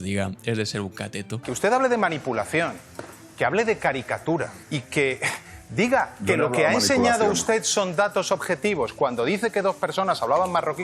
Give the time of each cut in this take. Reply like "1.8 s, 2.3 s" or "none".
1.5 s, 4.6 s